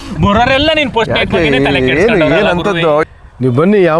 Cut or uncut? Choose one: cut